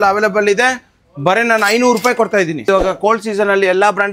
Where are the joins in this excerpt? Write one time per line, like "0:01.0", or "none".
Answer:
0:02.7